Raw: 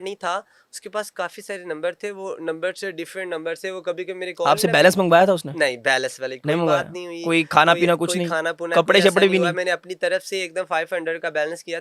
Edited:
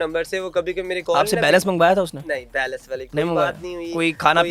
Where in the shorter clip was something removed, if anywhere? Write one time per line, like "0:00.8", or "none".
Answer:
none